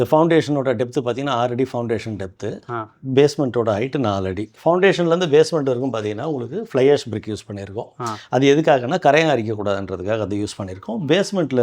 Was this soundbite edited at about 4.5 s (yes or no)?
yes